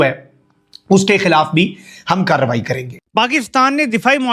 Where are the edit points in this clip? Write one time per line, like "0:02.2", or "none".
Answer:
0:02.9